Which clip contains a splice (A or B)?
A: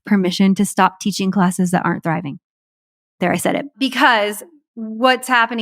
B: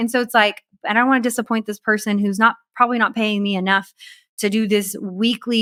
A